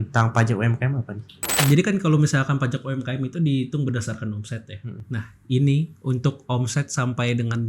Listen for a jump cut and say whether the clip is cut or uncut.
cut